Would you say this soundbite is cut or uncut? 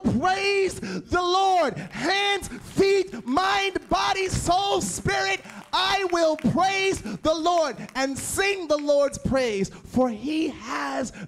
uncut